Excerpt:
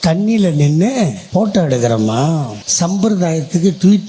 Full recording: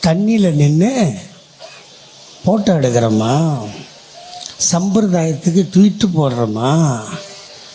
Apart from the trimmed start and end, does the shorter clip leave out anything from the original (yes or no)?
yes